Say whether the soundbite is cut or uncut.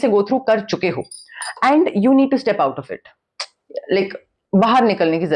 uncut